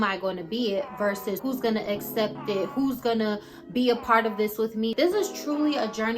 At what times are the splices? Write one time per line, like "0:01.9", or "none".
0:01.4
0:04.9